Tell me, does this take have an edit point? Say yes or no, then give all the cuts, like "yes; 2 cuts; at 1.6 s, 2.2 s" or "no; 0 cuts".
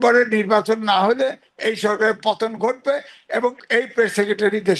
yes; 1 cut; at 3.6 s